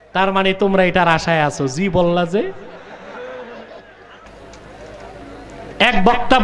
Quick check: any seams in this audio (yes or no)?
yes